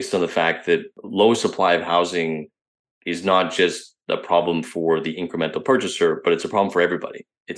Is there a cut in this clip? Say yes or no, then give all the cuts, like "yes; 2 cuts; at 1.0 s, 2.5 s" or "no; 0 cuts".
yes; 1 cut; at 1.0 s